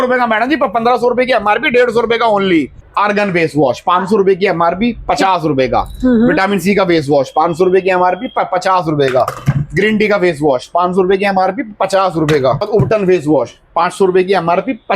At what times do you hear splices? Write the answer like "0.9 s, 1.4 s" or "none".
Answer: 2.8 s, 12.7 s